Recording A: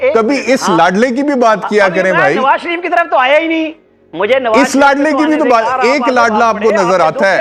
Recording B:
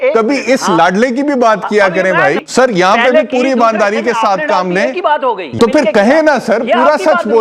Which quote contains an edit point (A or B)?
B